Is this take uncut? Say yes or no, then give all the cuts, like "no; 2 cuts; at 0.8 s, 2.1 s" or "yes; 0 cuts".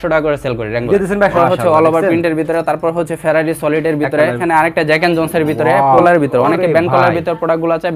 no; 3 cuts; at 1.3 s, 4.4 s, 6.0 s